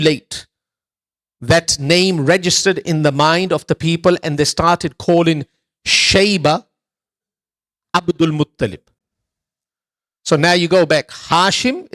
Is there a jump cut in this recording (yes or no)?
no